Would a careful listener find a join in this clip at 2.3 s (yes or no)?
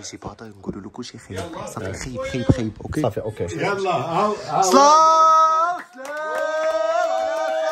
no